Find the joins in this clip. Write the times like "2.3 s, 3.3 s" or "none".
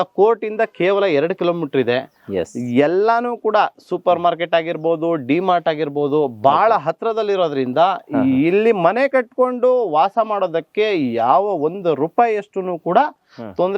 none